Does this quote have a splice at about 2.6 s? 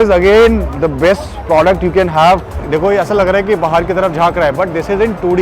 yes; 1 cut; at 2.6 s

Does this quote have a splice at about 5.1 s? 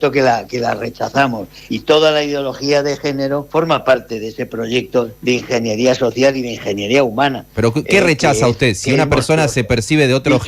yes; 2 cuts; at 3.5 s, 5.1 s

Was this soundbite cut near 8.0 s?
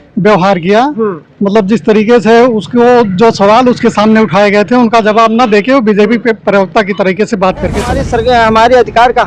yes; 1 cut; at 8.0 s

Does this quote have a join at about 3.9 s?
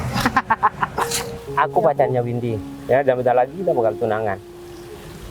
no; 1 cut; at 1.2 s

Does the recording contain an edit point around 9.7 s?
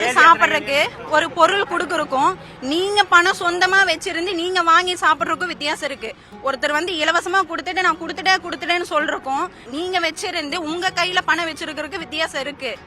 yes; 1 cut; at 9.7 s

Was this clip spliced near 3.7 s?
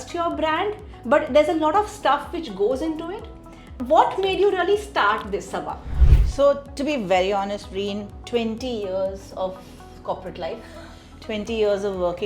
yes; 1 cut; at 3.7 s

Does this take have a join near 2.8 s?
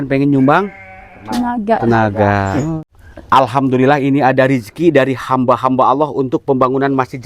yes; 1 cut; at 2.8 s

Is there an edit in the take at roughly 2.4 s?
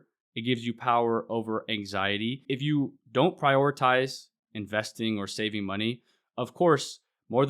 yes; 1 cut; at 2.4 s

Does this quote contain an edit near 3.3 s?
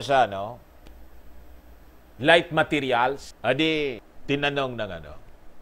yes; 2 cuts; at 3.3 s, 4.1 s

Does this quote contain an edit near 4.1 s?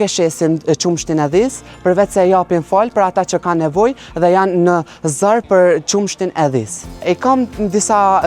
no; 0 cuts

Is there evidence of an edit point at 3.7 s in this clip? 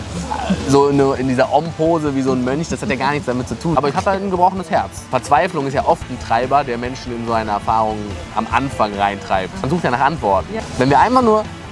yes; 4 cuts; at 3.7 s, 5.0 s, 9.7 s, 10.5 s

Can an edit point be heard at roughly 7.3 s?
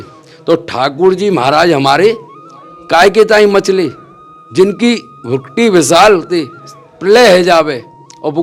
no; 0 cuts

